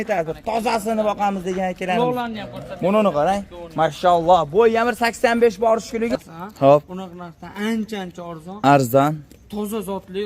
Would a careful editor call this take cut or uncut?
cut